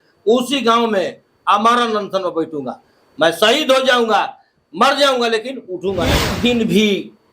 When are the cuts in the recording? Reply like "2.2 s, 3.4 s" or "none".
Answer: 6.3 s